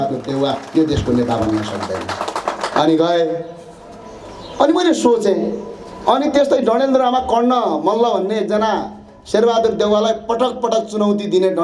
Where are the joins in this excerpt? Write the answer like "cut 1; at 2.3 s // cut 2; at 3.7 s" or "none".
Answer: none